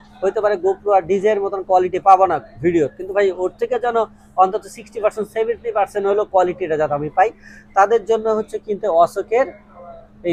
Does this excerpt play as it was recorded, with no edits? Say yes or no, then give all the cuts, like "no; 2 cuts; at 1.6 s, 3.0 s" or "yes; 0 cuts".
yes; 0 cuts